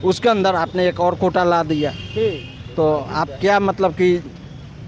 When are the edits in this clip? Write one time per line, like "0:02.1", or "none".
none